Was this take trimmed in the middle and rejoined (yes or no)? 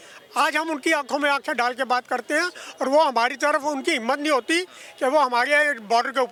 no